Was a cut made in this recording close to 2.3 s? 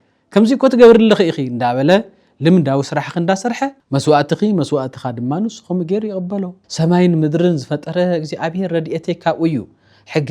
no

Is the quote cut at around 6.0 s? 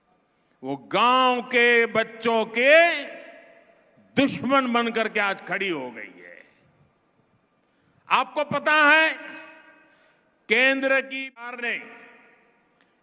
no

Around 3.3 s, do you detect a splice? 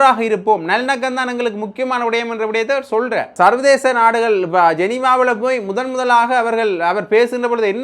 yes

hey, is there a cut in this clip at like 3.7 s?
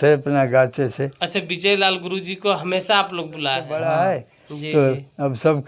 yes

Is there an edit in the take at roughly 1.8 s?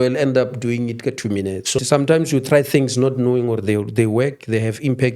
yes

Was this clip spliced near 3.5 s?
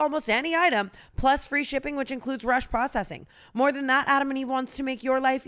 no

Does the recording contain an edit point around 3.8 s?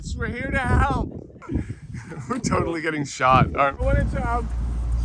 yes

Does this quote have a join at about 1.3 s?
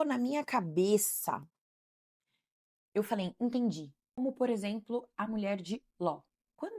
no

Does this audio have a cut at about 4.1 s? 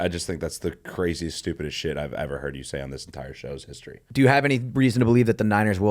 yes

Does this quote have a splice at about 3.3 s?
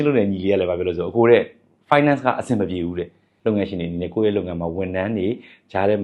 yes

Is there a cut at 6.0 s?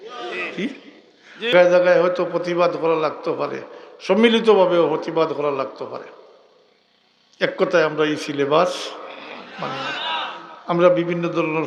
no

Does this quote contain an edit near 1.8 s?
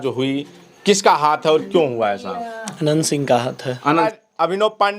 no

